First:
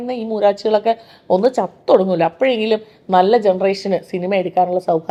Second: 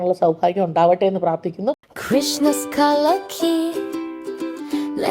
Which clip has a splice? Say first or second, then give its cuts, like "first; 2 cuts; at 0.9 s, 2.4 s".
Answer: second; 1 cut; at 1.9 s